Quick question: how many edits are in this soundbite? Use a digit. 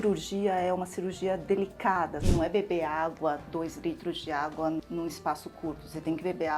1